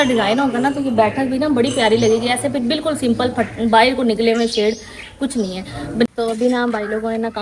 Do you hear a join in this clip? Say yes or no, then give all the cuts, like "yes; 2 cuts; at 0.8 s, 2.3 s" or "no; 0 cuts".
yes; 1 cut; at 6.1 s